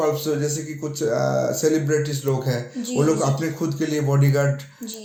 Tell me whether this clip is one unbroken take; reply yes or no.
yes